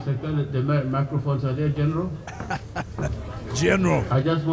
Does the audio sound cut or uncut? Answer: uncut